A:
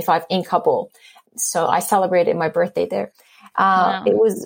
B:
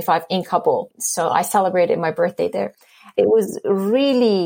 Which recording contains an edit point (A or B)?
B